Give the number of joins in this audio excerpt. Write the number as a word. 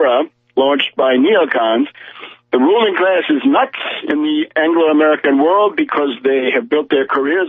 zero